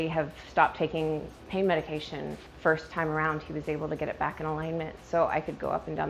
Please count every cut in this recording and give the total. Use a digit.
2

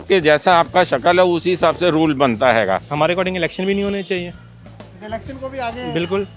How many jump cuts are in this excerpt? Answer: 1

